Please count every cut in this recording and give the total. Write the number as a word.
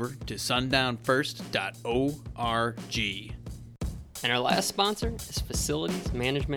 one